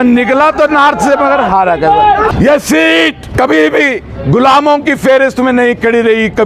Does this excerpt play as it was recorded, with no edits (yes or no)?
no